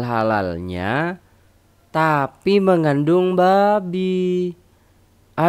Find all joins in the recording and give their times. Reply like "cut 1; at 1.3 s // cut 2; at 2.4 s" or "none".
none